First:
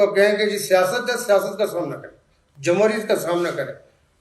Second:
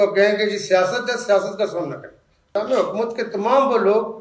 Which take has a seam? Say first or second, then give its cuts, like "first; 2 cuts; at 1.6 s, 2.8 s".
second; 1 cut; at 2.5 s